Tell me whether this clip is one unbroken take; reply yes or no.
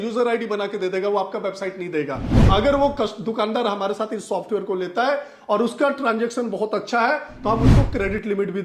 no